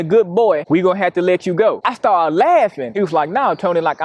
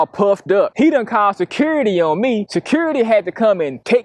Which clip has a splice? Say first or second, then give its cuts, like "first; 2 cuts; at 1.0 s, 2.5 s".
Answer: first; 1 cut; at 2.8 s